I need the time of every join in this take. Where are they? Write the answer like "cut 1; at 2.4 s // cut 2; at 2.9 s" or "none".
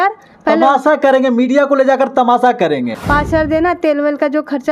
cut 1; at 2.9 s